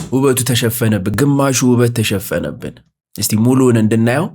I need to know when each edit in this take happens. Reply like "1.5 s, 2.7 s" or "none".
1.1 s